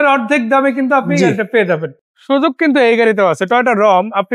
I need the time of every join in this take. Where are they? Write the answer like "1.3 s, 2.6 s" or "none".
1.9 s